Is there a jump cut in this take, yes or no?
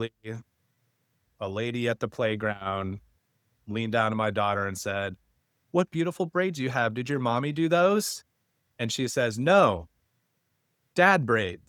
no